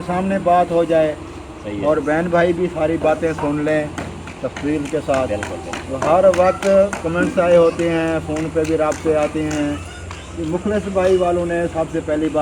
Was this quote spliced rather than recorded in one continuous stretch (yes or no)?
no